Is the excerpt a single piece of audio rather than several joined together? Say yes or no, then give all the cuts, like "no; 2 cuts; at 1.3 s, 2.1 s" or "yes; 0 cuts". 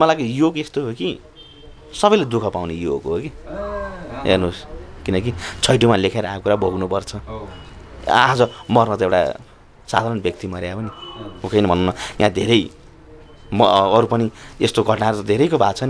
yes; 0 cuts